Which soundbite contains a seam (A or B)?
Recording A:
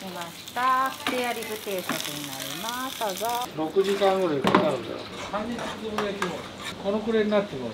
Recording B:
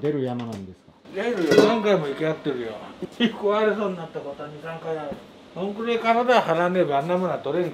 A